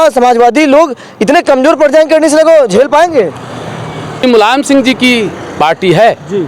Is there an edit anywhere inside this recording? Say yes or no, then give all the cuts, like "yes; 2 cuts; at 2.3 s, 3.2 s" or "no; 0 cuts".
yes; 1 cut; at 4.2 s